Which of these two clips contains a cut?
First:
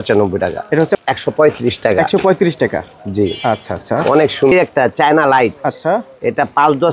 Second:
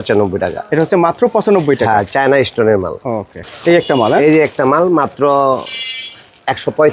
first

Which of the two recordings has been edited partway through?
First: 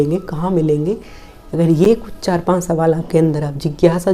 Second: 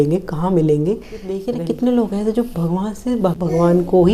second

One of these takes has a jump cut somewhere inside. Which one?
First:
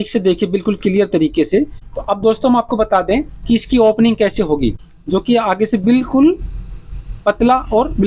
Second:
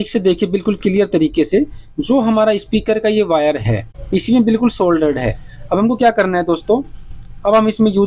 first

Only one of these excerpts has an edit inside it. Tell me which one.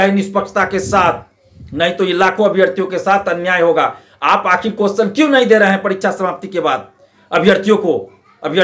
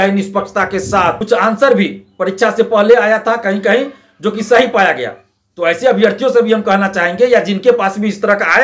second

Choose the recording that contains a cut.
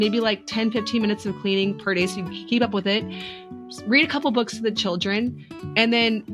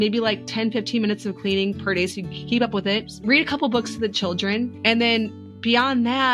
second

